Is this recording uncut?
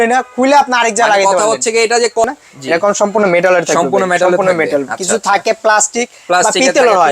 no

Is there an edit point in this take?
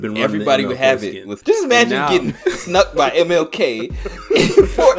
yes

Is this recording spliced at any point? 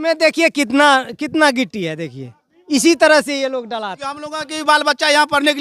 yes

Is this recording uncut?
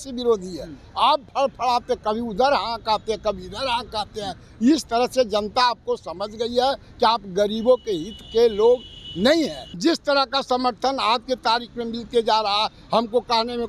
no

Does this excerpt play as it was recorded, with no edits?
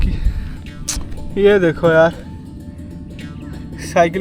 yes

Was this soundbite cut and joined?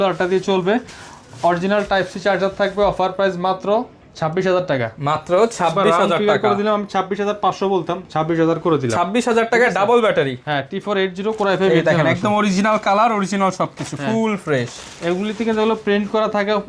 no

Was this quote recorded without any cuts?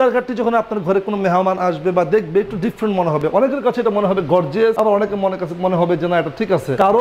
yes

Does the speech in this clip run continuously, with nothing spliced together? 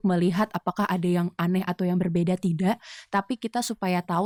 yes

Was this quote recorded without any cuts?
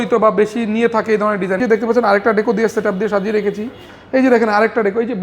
no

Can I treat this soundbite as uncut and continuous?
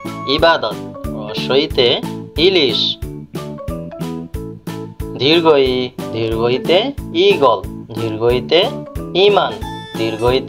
no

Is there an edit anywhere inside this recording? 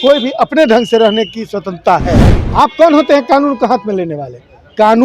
yes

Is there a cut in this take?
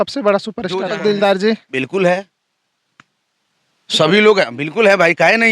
yes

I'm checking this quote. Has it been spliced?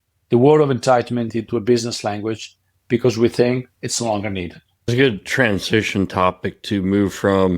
yes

